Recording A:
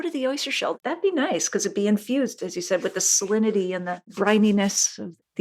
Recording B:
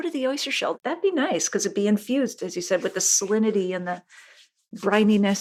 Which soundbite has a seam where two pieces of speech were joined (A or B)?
A